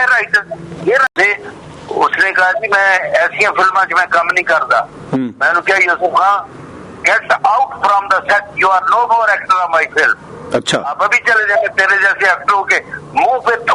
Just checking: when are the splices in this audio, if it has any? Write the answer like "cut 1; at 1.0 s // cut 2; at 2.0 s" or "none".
cut 1; at 1.1 s